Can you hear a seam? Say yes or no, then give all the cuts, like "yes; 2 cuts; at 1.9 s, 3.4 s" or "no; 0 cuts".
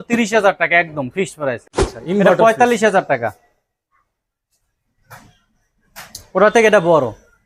yes; 1 cut; at 1.7 s